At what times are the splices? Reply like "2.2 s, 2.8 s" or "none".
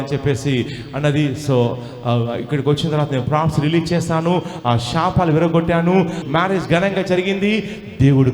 6.2 s